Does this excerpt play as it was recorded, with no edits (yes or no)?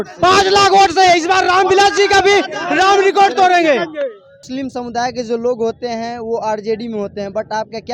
no